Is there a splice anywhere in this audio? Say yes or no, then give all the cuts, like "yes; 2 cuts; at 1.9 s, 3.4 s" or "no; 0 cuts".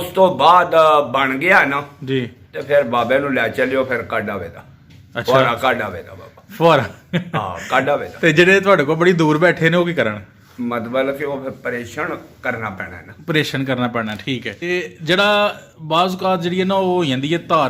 yes; 1 cut; at 14.7 s